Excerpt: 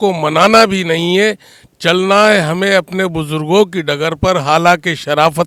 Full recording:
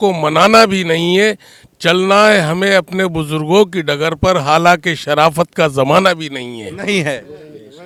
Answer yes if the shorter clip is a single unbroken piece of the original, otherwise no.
yes